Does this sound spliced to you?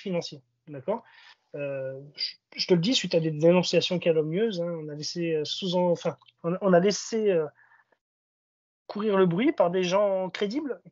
no; 0 cuts

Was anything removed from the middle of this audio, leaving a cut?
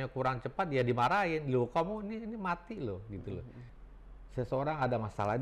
yes; 1 cut; at 3.7 s

